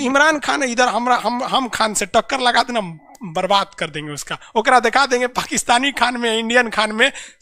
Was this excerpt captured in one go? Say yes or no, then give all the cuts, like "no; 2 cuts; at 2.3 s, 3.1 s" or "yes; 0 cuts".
yes; 0 cuts